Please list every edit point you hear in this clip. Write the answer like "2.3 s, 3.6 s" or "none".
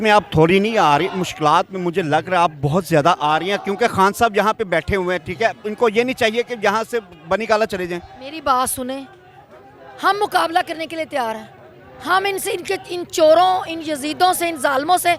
none